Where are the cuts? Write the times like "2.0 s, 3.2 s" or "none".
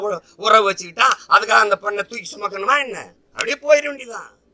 none

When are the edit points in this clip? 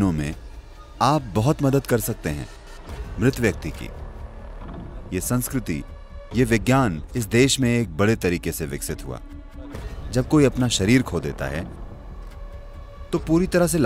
9.7 s

